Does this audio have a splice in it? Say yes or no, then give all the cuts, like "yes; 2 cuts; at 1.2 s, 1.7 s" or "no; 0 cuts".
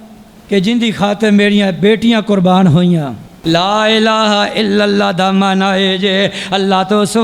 yes; 1 cut; at 3.2 s